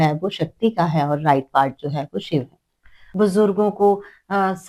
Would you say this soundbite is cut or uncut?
cut